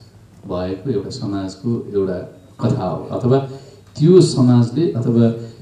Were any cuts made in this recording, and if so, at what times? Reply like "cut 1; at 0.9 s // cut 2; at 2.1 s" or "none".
none